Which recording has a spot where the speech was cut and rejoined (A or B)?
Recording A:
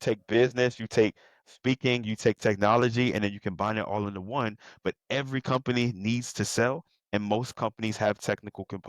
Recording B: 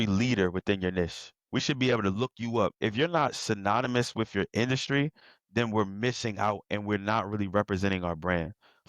B